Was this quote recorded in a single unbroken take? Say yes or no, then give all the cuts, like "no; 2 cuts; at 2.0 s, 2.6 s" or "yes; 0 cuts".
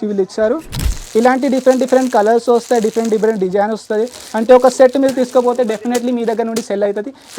no; 1 cut; at 0.9 s